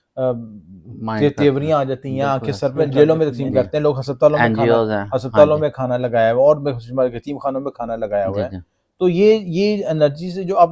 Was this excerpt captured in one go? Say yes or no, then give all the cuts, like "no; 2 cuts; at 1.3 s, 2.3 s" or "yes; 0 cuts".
no; 1 cut; at 2.8 s